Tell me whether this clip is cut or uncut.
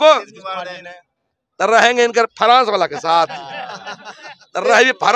uncut